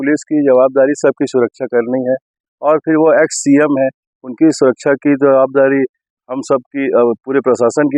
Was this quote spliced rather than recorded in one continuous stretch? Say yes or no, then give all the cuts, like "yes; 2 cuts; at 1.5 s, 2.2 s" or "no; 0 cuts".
no; 0 cuts